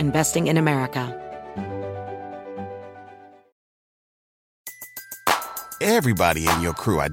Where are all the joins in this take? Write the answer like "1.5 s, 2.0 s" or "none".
1.1 s